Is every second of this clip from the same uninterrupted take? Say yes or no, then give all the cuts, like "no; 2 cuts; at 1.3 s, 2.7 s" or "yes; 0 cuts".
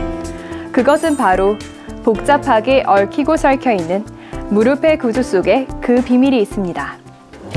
no; 1 cut; at 3.5 s